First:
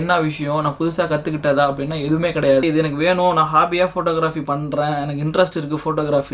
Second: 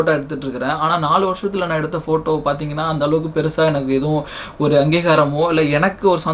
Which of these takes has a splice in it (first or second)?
first